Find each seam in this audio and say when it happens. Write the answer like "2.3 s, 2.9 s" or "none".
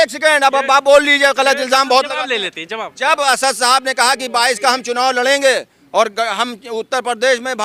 none